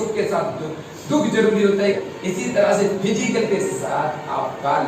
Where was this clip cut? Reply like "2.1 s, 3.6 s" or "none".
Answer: 2.0 s